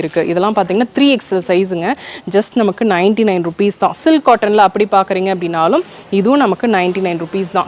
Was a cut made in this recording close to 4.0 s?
yes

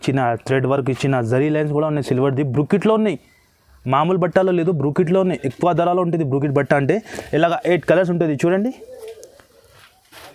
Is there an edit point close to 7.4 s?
no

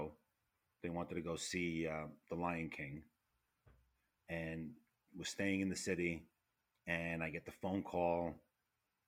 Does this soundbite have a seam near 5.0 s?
yes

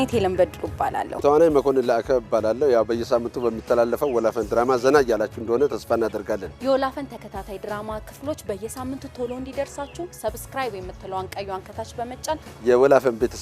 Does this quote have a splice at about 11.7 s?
no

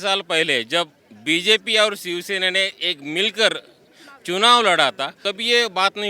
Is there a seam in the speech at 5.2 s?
yes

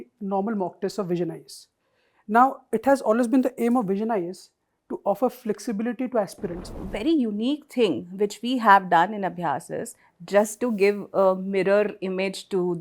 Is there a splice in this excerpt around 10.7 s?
no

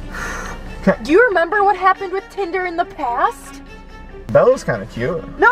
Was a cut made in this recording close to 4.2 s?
yes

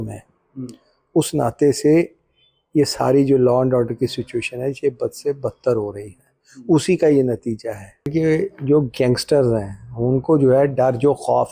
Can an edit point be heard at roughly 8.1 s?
yes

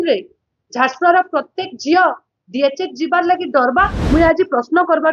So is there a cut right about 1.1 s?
no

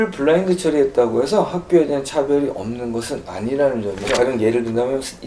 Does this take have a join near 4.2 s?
yes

